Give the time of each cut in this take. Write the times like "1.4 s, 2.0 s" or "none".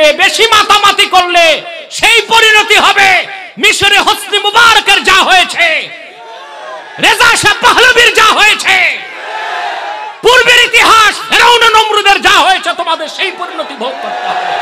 none

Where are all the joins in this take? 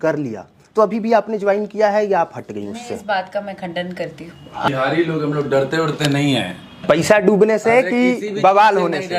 4.7 s

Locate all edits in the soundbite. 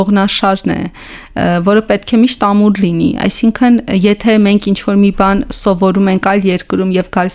none

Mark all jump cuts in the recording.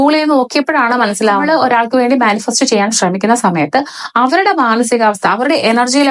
1.4 s

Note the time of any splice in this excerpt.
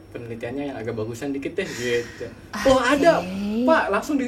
none

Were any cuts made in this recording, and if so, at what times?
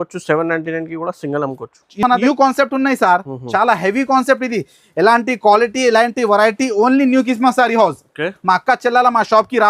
2.2 s

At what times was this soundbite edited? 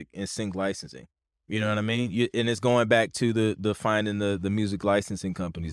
none

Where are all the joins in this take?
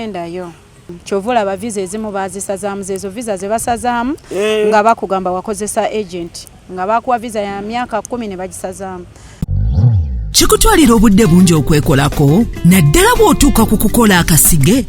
1.0 s, 9.2 s

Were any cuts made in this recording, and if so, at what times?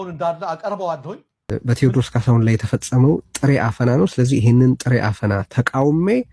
1.3 s

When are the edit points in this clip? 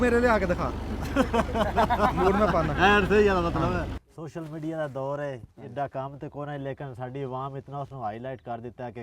4.0 s

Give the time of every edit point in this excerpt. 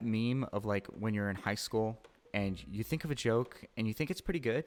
none

